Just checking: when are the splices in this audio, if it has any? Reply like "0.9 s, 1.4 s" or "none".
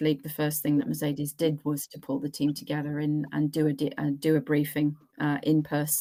none